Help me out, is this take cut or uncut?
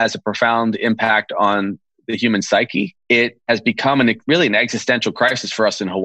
cut